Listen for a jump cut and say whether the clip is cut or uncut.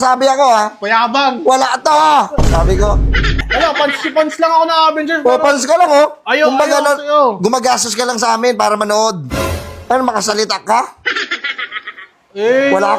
cut